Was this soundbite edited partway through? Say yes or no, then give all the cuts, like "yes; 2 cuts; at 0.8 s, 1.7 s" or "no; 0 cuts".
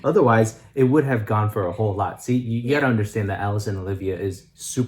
no; 0 cuts